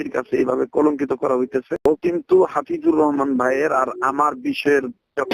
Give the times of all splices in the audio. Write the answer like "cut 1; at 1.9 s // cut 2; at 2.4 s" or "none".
cut 1; at 1.8 s